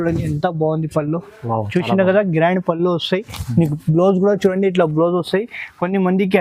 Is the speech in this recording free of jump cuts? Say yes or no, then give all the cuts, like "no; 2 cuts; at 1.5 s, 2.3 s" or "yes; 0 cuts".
yes; 0 cuts